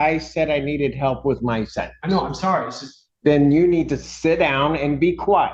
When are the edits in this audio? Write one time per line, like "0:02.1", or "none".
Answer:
none